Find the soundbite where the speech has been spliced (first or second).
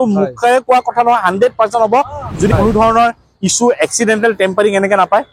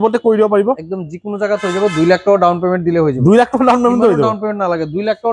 first